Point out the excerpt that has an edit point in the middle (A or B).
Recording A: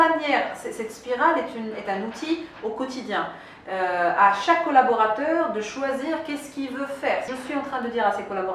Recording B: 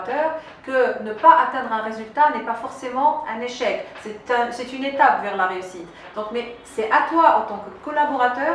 A